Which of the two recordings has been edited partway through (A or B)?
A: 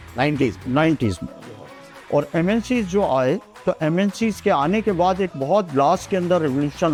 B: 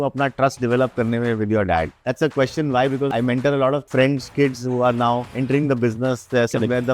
B